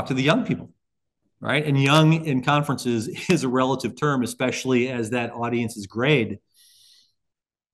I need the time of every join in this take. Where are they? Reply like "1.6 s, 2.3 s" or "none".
none